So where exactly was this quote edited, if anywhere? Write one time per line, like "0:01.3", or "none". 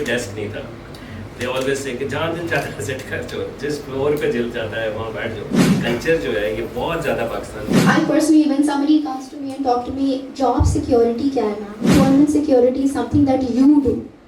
0:05.7
0:07.5
0:11.9